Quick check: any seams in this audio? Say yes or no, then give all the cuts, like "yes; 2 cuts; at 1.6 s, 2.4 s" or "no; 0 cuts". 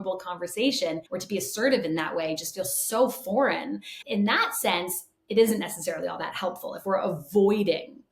yes; 1 cut; at 1.1 s